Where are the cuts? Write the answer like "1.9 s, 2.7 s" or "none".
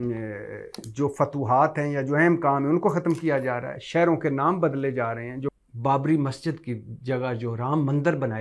5.5 s